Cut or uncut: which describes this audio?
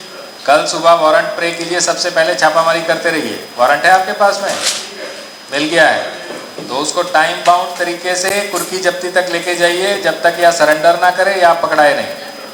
uncut